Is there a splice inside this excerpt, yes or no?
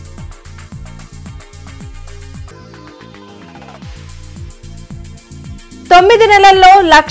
yes